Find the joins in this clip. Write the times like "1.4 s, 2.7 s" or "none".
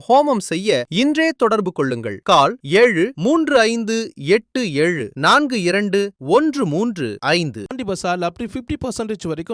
7.6 s